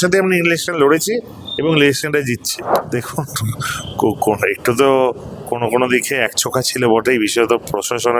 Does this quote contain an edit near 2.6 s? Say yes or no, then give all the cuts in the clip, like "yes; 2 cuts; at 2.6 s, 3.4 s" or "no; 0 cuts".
yes; 1 cut; at 2.6 s